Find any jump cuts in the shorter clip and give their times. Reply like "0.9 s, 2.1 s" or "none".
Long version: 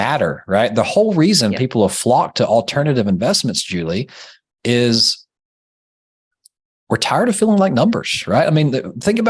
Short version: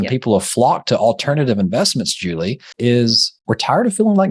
2.6 s, 3.3 s